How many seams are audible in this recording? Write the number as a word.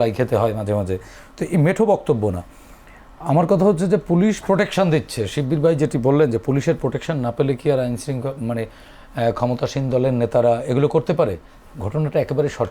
zero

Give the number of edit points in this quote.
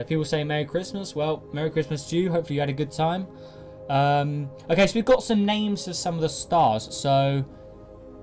one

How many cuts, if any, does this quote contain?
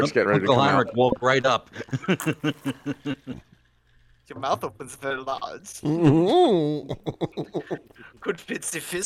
zero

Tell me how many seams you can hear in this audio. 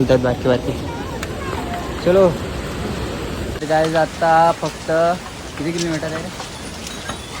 one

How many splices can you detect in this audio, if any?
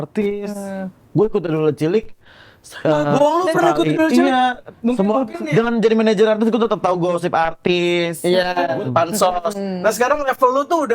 two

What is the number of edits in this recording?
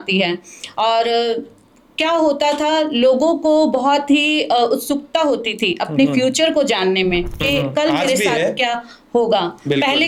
zero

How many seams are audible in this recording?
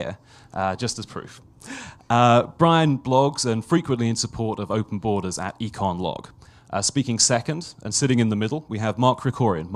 one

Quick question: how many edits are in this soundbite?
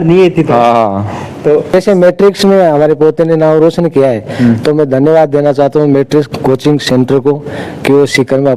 one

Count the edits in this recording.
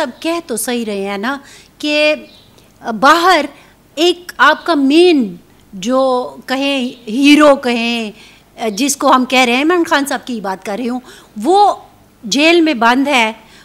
zero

